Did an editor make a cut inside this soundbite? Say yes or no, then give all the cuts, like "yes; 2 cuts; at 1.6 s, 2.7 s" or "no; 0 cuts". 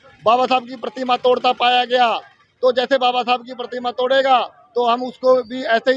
no; 0 cuts